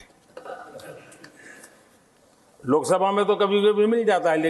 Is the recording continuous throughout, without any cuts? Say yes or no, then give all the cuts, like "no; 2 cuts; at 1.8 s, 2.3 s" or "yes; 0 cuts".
yes; 0 cuts